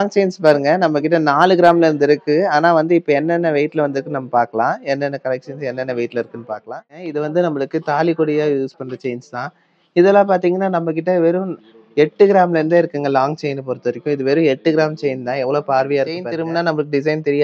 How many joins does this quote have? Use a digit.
2